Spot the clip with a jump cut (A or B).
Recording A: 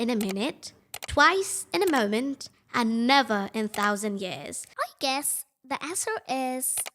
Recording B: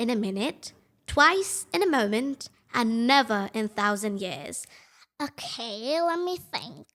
A